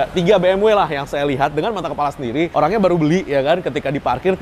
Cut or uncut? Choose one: uncut